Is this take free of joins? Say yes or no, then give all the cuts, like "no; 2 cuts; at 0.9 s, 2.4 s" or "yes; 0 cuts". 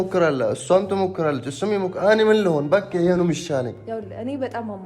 no; 1 cut; at 3.8 s